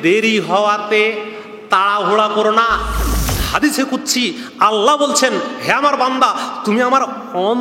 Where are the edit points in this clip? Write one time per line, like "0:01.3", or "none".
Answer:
0:03.3

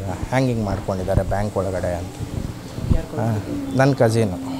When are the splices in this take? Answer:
none

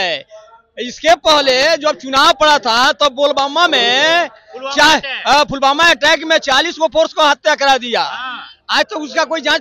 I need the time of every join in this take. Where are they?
none

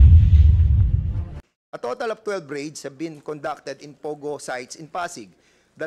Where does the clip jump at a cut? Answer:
0:01.4

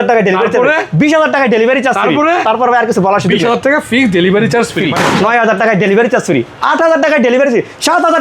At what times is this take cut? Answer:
0:04.9

